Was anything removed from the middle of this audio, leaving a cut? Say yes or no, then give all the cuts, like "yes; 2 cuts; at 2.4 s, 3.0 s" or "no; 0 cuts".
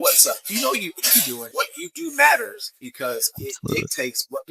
yes; 1 cut; at 1.4 s